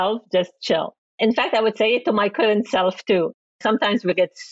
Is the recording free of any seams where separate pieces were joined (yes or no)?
no